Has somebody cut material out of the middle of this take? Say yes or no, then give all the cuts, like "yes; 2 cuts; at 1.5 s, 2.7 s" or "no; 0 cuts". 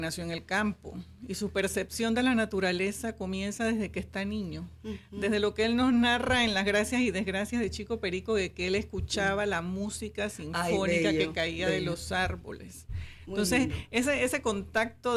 no; 0 cuts